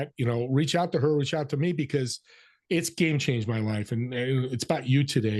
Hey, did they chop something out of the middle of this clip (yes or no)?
no